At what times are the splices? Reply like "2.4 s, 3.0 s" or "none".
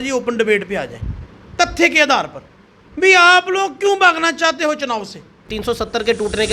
5.5 s